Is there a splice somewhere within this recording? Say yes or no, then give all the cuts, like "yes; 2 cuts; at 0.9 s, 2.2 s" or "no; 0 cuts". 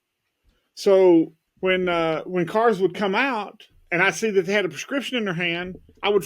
yes; 1 cut; at 1.4 s